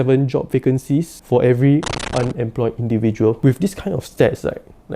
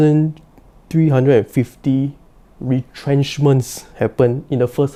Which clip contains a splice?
first; 1 cut; at 3.4 s

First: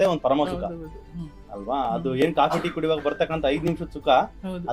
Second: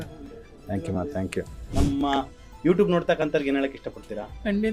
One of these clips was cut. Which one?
second; 1 cut; at 1.6 s

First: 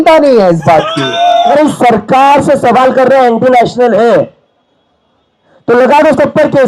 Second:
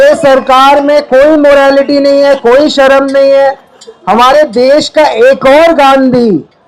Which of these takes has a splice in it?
first; 1 cut; at 1.5 s

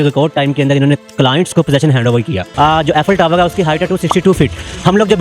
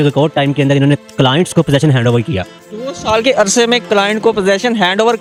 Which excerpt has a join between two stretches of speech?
first; 1 cut; at 2.5 s

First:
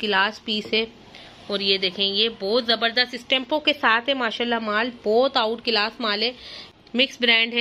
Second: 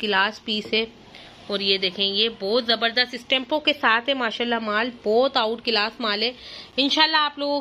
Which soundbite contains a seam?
first; 1 cut; at 6.6 s

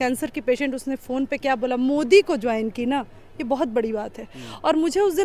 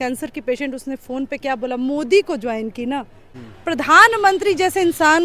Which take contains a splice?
second; 1 cut; at 3.3 s

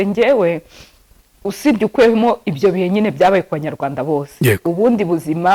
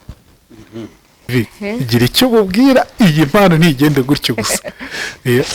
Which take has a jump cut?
second; 1 cut; at 1.3 s

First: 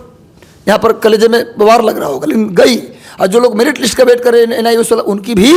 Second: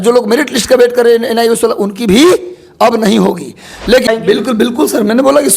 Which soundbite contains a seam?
second; 1 cut; at 4.1 s

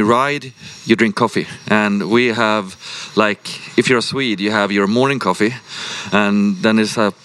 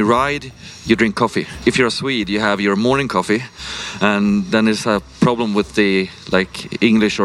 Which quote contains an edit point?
second; 1 cut; at 1.5 s

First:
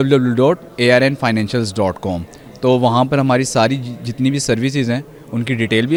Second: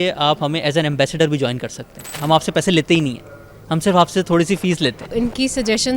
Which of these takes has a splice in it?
second; 2 cuts; at 2.1 s, 5.1 s

